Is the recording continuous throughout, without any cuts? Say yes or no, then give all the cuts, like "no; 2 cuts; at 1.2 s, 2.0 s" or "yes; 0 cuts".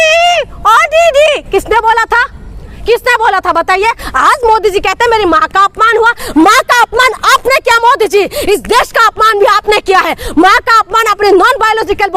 yes; 0 cuts